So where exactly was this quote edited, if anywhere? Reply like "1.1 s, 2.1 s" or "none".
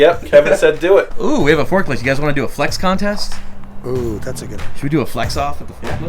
1.1 s